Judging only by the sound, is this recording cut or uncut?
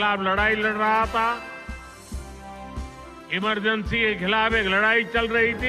cut